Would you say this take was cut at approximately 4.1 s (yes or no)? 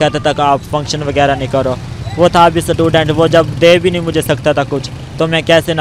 no